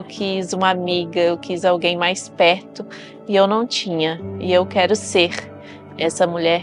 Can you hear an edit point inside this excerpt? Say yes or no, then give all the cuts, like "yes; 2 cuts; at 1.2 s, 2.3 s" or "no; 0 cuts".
no; 0 cuts